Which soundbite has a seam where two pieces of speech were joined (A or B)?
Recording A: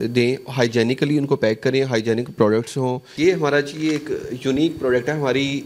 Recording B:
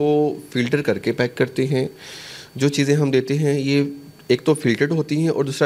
A